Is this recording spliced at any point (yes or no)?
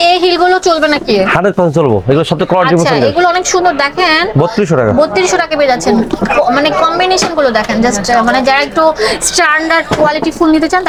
no